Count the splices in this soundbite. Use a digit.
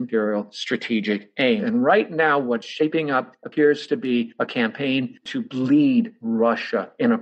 1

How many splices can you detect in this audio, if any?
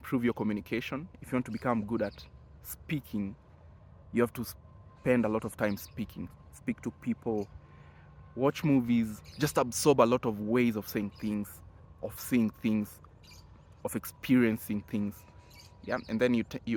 0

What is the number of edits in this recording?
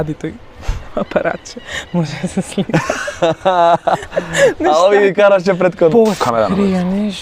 1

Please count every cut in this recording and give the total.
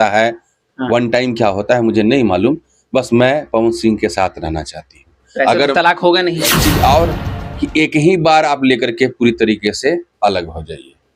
1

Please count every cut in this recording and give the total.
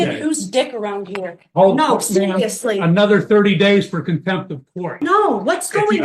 1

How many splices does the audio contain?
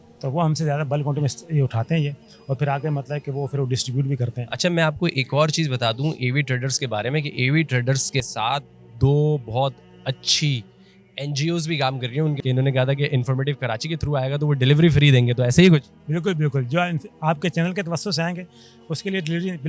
1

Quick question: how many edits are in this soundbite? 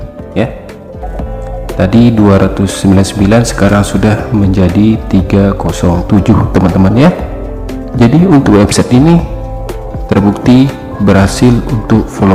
0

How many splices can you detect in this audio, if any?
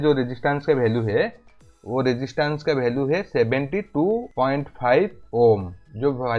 1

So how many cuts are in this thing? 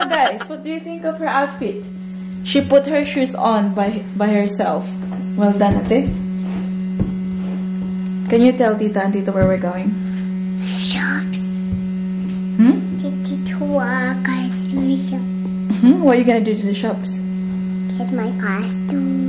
0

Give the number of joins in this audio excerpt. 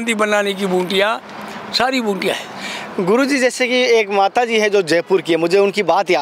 0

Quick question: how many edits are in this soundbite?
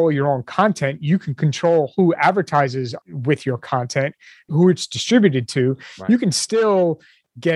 2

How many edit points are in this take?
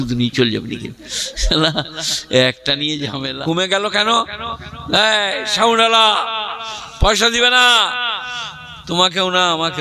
1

